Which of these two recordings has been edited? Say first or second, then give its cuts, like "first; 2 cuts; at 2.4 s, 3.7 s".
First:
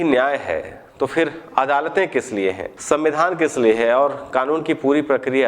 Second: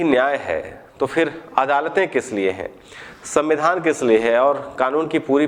first; 1 cut; at 2.7 s